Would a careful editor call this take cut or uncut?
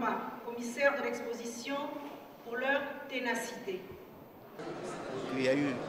cut